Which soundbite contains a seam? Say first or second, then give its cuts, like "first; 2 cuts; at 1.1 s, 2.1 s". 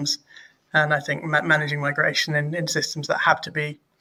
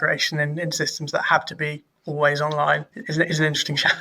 second; 1 cut; at 3.0 s